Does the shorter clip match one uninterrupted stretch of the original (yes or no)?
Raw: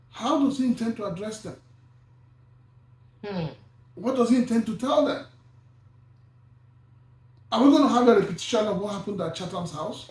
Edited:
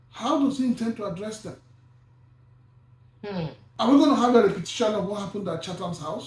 no